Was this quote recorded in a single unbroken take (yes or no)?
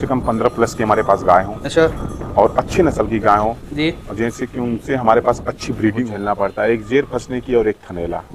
no